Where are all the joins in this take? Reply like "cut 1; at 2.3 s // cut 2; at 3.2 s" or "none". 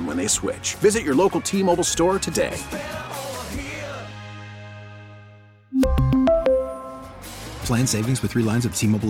none